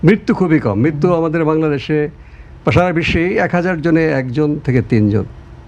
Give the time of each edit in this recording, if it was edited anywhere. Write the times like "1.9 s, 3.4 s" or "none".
none